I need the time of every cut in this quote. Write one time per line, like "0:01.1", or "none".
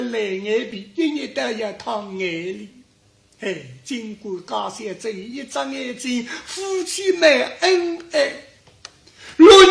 0:05.2